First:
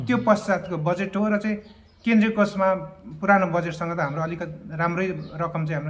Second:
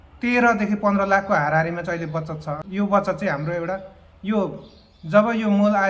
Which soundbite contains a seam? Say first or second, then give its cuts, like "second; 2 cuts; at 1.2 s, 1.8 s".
second; 1 cut; at 2.6 s